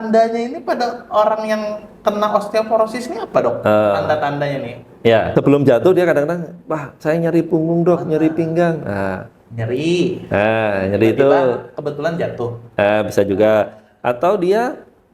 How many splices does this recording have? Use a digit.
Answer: 1